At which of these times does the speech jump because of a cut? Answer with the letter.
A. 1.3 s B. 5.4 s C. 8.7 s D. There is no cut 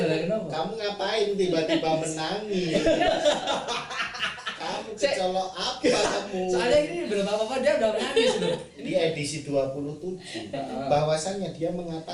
C